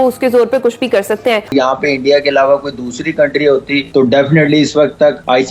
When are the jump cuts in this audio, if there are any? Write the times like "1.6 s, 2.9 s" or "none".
1.5 s

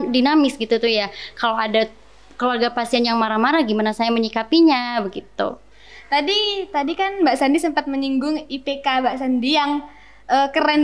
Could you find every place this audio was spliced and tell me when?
none

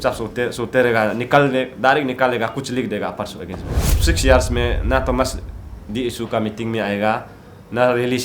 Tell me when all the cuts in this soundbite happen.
3.9 s

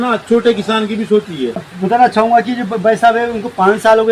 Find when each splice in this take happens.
1.7 s

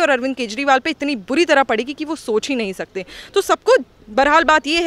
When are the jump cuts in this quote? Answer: none

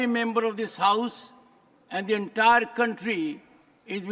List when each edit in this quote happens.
none

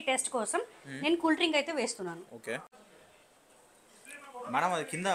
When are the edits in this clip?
2.7 s

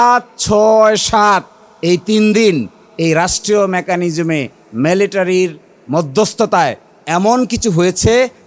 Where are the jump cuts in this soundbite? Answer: none

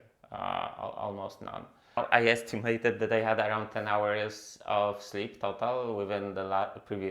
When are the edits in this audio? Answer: 2.0 s

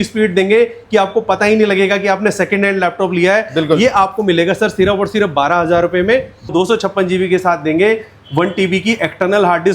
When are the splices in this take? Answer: 6.5 s

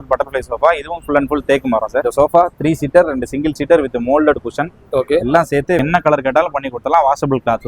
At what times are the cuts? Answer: 2.0 s, 5.8 s

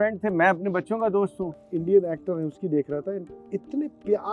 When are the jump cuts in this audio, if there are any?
1.6 s

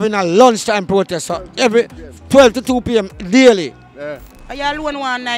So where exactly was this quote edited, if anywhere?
4.4 s

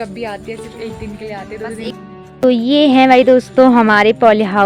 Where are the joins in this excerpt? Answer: 1.9 s

